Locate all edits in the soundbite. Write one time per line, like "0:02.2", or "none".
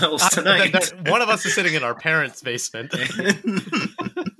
0:03.1

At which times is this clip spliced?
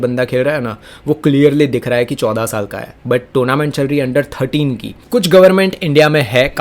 0:05.0

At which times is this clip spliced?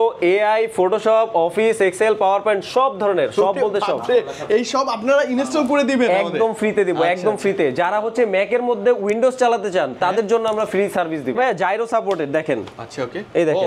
0:11.4

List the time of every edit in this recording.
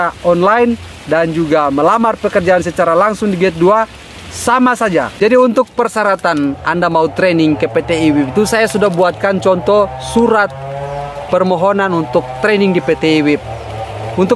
0:05.1

